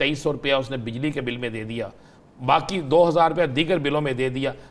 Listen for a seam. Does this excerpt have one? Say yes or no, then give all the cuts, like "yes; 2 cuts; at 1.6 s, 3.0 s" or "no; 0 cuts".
no; 0 cuts